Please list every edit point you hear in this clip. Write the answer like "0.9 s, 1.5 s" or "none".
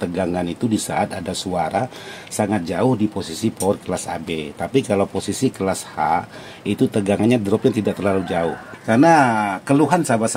8.6 s